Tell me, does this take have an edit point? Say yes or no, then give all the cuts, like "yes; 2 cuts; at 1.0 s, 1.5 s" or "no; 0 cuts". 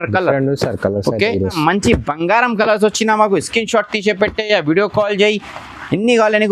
yes; 1 cut; at 1.6 s